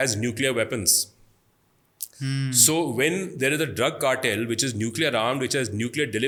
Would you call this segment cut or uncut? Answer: uncut